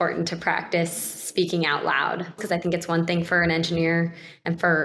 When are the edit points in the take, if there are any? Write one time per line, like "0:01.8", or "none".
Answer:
0:02.4